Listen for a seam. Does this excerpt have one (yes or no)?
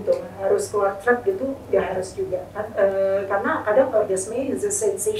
no